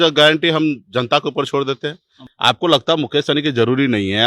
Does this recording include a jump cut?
yes; 1 cut; at 2.2 s

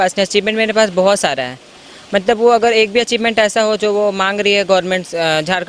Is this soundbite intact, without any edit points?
yes; 0 cuts

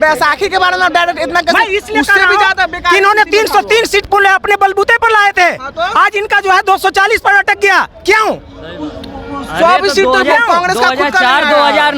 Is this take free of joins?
yes; 0 cuts

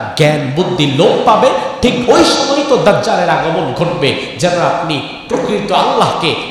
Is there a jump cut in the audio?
no; 0 cuts

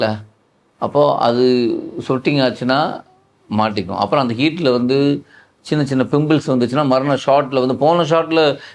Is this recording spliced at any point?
no; 0 cuts

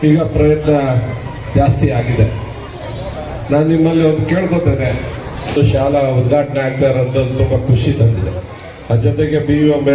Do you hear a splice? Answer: yes; 1 cut; at 5.5 s

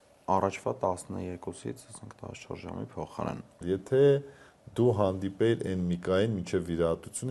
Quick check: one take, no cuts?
no; 1 cut; at 3.6 s

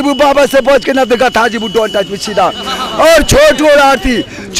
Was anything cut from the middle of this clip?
no; 0 cuts

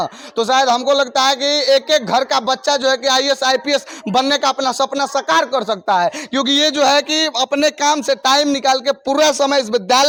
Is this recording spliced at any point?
no; 0 cuts

